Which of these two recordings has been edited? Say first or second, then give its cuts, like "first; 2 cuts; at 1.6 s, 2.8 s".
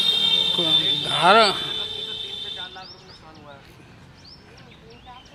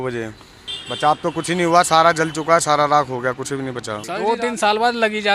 second; 1 cut; at 4.1 s